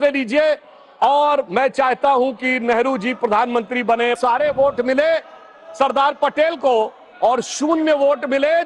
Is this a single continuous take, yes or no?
no